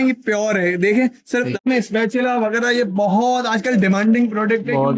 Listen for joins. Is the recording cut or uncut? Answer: cut